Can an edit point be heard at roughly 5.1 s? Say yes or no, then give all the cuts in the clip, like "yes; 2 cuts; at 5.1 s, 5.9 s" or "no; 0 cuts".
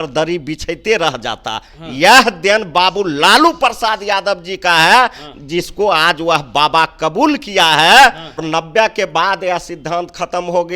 no; 1 cut; at 8.4 s